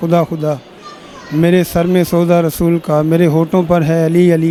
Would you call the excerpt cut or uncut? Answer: uncut